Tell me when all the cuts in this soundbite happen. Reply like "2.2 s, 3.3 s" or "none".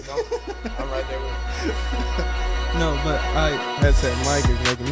3.6 s